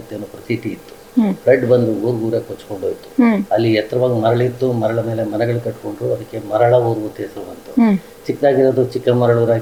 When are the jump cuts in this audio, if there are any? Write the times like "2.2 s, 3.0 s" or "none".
none